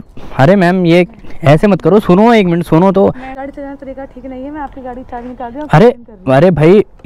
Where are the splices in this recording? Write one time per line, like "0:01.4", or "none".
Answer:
0:03.3